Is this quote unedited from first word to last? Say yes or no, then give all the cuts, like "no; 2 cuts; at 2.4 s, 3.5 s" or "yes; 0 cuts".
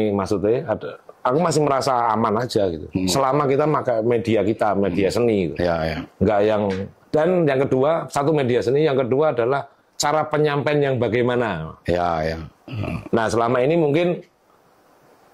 yes; 0 cuts